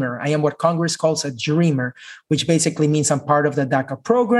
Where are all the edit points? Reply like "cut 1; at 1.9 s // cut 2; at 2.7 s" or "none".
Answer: none